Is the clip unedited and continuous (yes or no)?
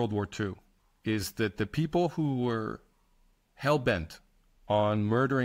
yes